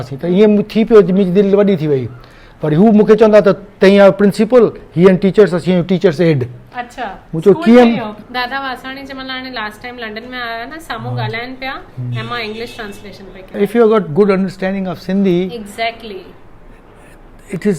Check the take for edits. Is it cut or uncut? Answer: cut